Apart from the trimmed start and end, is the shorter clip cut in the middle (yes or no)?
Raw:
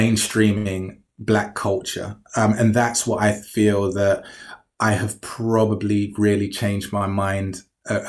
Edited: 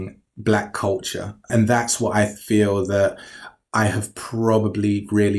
yes